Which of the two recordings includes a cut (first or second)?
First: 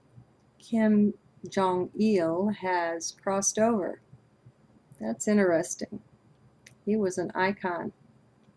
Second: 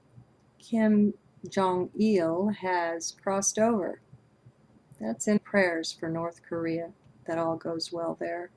first